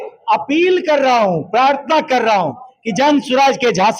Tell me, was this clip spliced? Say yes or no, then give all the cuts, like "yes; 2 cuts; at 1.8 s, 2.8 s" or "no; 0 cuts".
no; 0 cuts